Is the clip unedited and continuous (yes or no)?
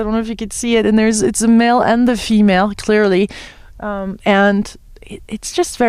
no